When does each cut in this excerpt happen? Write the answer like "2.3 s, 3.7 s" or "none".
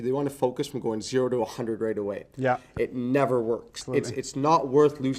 3.8 s